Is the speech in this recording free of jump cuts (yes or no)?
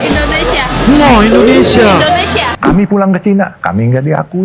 no